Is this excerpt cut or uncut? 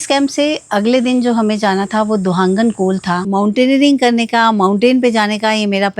cut